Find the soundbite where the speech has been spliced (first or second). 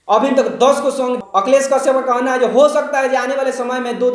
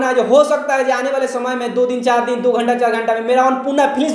first